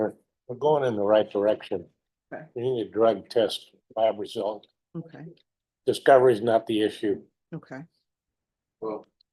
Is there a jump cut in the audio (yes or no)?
no